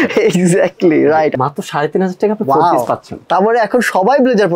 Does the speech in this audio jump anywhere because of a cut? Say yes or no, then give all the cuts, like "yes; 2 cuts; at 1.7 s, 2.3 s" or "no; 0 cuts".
yes; 2 cuts; at 1.3 s, 3.1 s